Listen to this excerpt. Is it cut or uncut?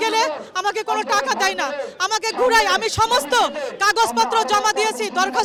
uncut